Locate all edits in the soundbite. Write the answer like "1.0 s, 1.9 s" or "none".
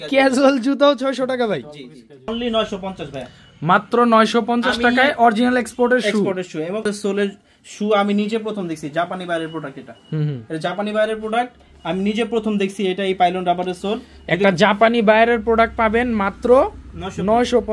2.3 s, 6.8 s